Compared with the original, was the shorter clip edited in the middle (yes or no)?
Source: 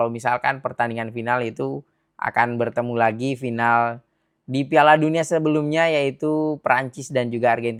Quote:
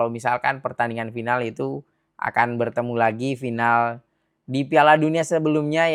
no